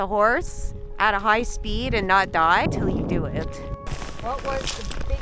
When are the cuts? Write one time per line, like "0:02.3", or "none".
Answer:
0:02.7
0:03.9

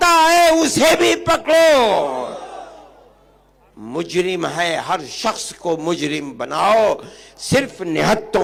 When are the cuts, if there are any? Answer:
none

